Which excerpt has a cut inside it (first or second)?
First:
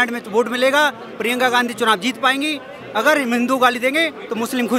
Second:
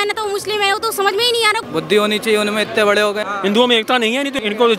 second